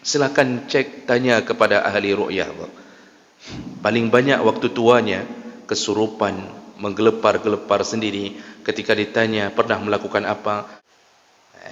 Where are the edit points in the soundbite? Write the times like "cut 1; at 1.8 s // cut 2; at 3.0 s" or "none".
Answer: cut 1; at 10.8 s